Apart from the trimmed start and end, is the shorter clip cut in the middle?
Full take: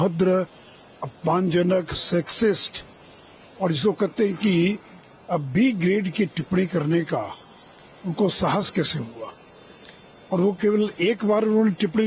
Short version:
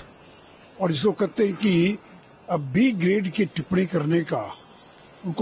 no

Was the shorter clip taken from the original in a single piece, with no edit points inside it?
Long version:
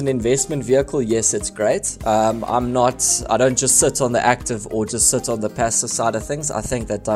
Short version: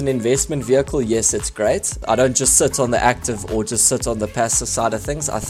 no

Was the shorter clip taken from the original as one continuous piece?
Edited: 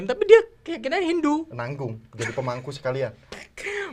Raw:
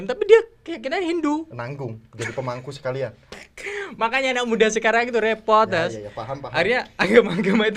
yes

